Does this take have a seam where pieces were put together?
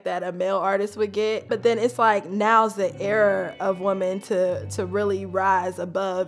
no; 0 cuts

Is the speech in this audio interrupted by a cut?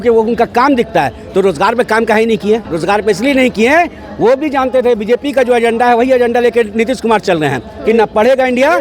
yes; 1 cut; at 2.7 s

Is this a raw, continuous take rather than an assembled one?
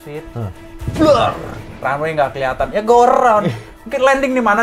yes; 0 cuts

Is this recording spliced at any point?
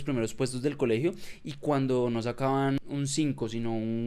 yes; 1 cut; at 2.8 s

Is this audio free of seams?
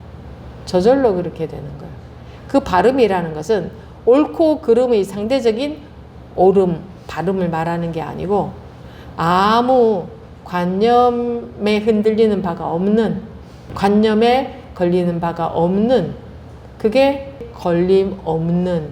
no; 2 cuts; at 13.7 s, 17.5 s

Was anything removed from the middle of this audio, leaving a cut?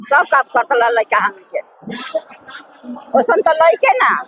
no; 0 cuts

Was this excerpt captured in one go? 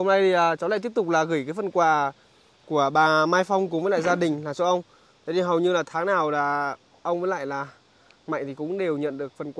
yes; 0 cuts

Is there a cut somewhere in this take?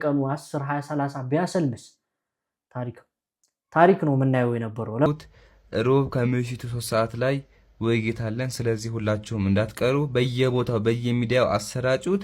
yes; 1 cut; at 5.1 s

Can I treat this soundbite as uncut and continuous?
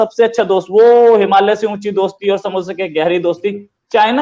yes; 0 cuts

